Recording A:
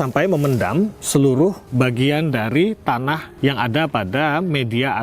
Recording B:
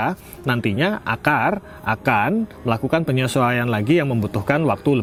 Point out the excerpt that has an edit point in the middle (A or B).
A